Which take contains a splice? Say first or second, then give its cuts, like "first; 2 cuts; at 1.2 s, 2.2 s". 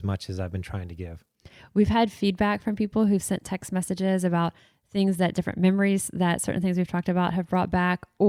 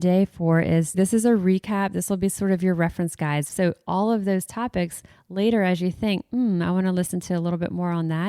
second; 2 cuts; at 1.0 s, 3.5 s